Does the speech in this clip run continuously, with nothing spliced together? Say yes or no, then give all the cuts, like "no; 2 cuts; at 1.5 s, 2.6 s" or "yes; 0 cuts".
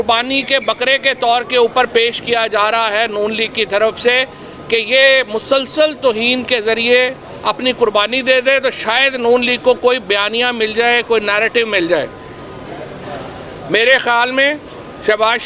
yes; 0 cuts